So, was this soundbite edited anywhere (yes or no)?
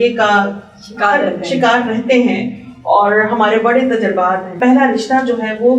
yes